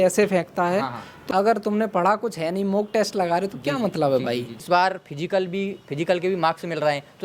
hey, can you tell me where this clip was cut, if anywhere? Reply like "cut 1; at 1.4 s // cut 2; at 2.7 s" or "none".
cut 1; at 1.1 s // cut 2; at 4.5 s